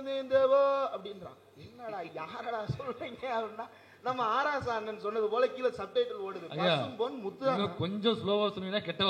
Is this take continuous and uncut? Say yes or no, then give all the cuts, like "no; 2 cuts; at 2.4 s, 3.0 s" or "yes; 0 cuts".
yes; 0 cuts